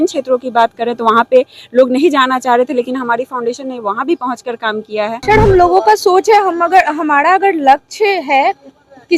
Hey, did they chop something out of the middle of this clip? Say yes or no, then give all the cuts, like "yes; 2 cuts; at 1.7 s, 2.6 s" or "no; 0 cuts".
yes; 1 cut; at 5.2 s